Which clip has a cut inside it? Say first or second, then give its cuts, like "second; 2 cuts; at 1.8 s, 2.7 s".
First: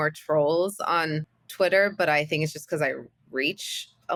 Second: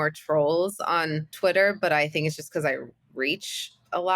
second; 1 cut; at 1.2 s